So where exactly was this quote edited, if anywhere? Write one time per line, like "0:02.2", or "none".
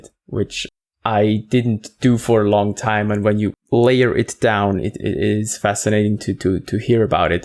0:03.5

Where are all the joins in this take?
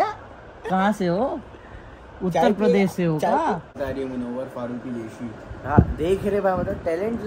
0:03.8

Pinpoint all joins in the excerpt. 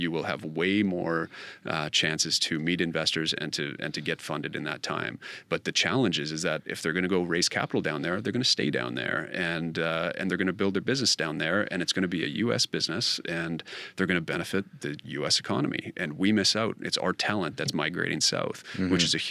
none

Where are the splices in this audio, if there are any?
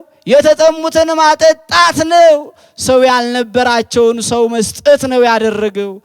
none

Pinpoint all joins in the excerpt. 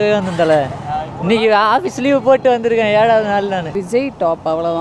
0:03.7

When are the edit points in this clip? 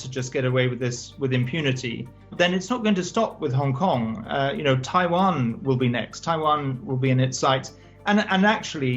0:02.3

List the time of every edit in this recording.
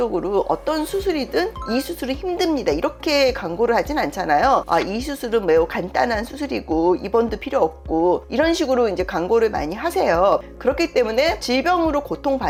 none

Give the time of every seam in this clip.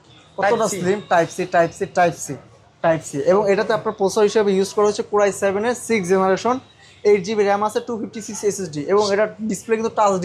none

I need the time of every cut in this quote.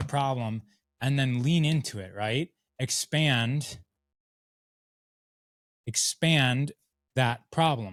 none

